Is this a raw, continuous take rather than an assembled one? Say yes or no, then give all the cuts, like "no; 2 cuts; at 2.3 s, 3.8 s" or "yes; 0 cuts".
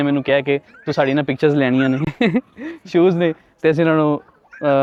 yes; 0 cuts